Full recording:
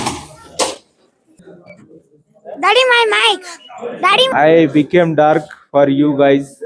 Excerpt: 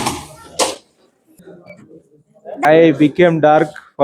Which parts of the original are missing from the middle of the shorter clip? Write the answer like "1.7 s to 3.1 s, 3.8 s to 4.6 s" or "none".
2.6 s to 4.4 s